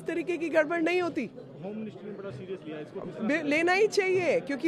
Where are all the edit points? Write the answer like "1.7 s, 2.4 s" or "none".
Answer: none